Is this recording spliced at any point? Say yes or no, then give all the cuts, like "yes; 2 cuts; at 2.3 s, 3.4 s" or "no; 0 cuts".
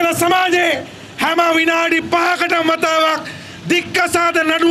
no; 0 cuts